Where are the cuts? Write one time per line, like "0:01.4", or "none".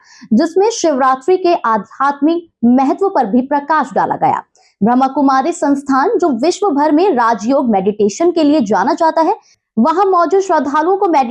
0:09.6